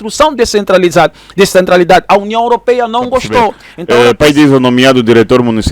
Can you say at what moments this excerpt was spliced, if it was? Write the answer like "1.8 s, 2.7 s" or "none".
3.7 s